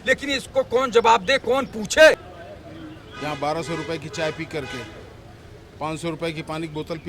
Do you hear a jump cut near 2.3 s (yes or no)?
yes